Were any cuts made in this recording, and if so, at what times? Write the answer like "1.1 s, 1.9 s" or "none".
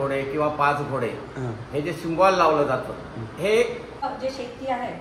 4.0 s

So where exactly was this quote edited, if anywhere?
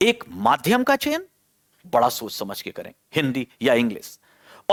none

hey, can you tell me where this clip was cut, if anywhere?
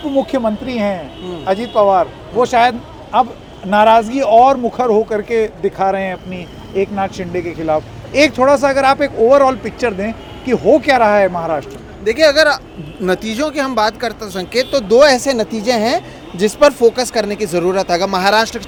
none

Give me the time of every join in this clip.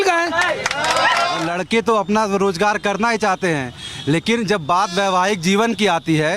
1.4 s

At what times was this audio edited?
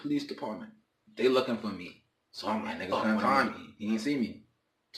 3.0 s

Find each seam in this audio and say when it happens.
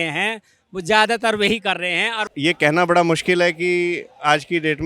2.2 s

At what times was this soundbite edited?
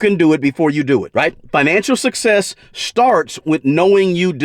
none

